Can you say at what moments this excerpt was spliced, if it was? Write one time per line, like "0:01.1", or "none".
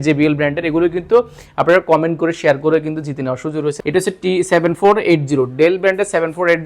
0:03.8

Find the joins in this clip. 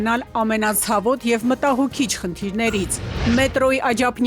0:03.0

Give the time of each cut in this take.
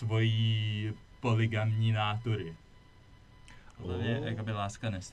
0:04.1

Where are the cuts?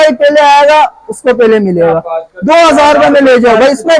none

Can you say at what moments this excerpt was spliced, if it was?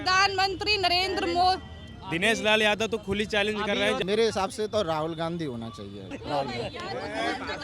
0:04.0
0:06.2

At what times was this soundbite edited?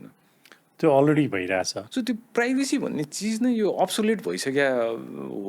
0:01.8

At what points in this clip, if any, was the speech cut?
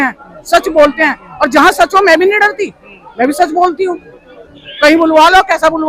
none

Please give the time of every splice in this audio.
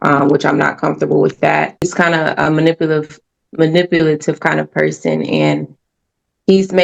0:01.8

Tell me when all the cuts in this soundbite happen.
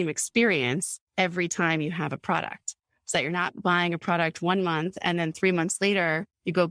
none

